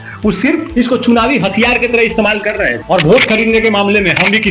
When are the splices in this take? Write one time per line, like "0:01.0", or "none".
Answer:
0:02.7